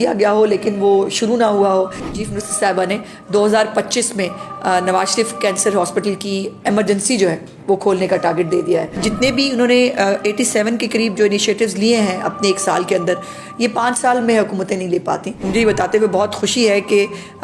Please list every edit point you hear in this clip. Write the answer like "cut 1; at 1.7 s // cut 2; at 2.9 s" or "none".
cut 1; at 2.2 s // cut 2; at 9.1 s // cut 3; at 15.3 s